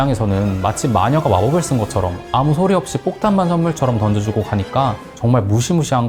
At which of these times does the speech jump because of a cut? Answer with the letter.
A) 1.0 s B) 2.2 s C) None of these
C